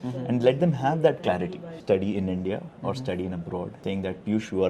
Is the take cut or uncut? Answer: cut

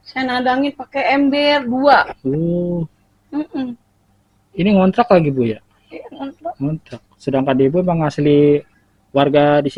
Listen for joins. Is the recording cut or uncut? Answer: uncut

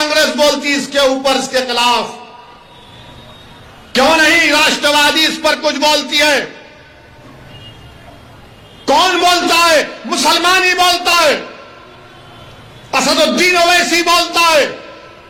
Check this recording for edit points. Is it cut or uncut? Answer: uncut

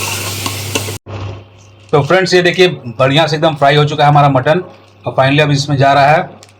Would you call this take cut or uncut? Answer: cut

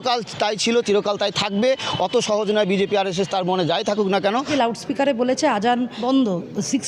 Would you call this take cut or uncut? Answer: cut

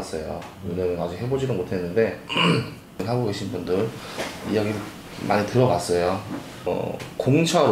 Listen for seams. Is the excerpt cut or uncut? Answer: cut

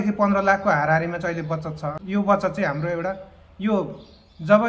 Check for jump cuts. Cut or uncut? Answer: cut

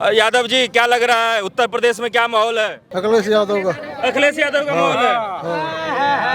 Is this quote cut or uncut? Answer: cut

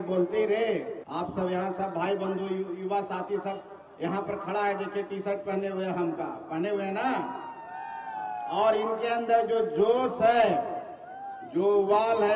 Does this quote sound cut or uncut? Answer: cut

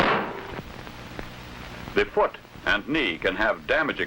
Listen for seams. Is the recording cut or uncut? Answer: cut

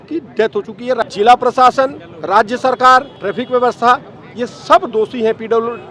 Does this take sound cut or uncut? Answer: cut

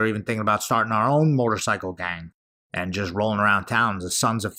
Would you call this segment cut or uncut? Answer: uncut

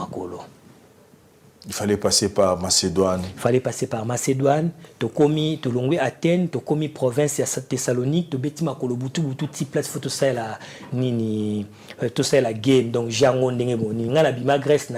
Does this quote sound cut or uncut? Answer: uncut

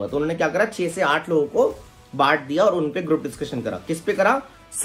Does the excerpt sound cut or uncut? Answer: uncut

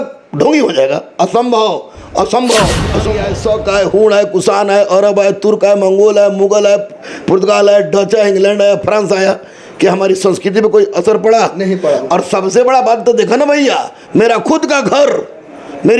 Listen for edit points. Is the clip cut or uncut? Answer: cut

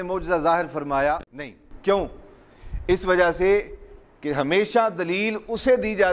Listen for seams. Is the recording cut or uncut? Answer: cut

